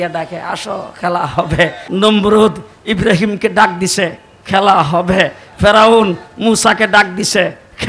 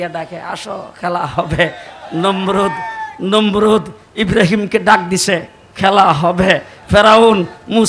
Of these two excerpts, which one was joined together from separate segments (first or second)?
first